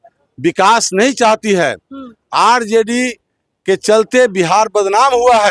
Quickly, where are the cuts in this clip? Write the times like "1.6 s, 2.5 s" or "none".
none